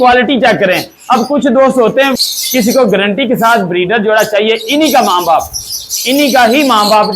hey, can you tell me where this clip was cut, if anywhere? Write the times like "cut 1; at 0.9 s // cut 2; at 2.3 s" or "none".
cut 1; at 2.1 s